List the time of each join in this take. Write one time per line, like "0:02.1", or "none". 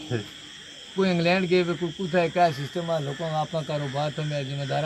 none